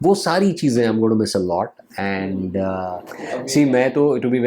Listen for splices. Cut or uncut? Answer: cut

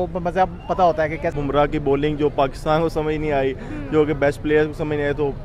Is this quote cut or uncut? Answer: cut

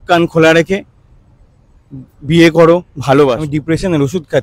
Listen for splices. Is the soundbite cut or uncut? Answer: cut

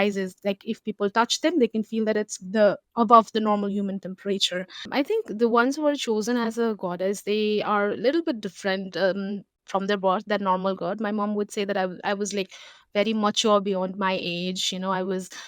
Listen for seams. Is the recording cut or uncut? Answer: cut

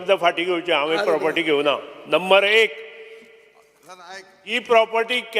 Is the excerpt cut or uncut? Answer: uncut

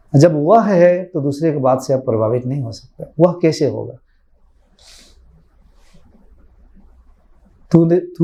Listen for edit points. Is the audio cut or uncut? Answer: uncut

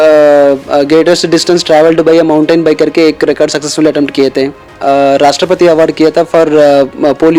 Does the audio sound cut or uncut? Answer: cut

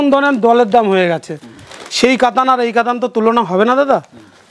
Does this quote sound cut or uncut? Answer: uncut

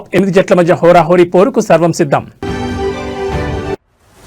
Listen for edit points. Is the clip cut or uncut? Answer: uncut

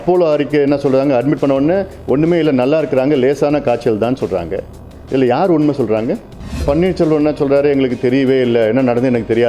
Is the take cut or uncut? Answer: cut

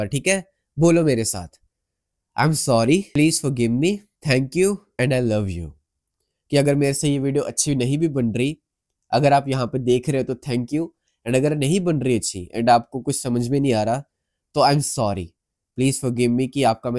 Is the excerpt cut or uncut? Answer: cut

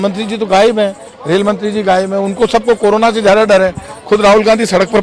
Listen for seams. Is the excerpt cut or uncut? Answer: uncut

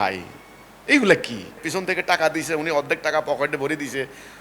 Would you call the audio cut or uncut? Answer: cut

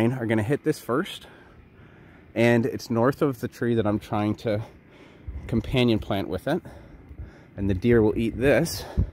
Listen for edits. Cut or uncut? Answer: uncut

